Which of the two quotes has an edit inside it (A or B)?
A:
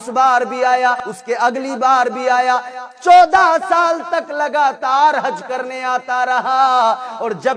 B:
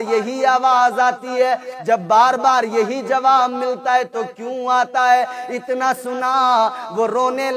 A